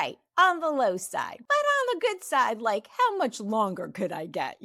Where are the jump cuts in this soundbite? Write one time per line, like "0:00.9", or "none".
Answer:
0:01.4